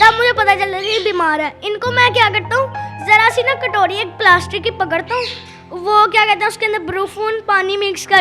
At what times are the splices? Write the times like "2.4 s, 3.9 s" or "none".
none